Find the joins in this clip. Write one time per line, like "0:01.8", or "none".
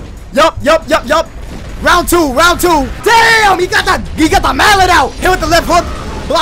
0:02.9
0:05.2

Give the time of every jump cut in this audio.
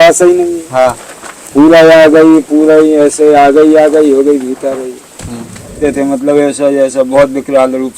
0:05.8

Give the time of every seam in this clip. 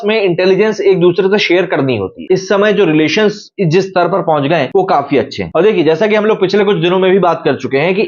0:02.2

